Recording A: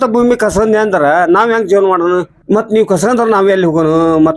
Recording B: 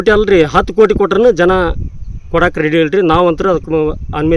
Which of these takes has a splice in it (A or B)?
A